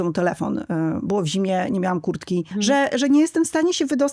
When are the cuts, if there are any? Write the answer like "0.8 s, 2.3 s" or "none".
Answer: 2.5 s